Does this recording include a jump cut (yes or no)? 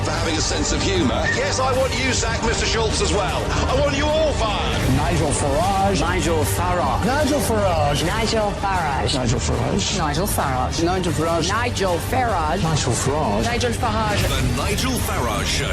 yes